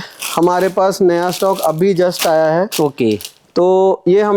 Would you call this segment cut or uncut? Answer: uncut